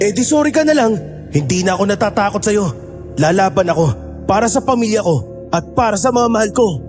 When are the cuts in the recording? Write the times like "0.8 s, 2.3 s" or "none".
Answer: none